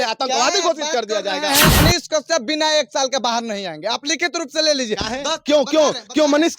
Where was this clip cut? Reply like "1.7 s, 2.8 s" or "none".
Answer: 1.8 s